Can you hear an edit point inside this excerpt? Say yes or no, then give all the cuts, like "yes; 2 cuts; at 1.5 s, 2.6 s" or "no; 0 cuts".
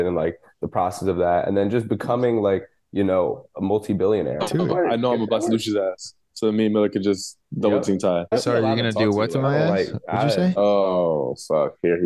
yes; 2 cuts; at 4.4 s, 8.3 s